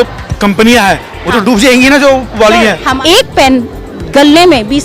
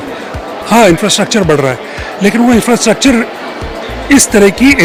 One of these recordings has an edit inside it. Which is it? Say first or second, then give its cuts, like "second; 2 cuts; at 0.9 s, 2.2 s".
first; 1 cut; at 3.0 s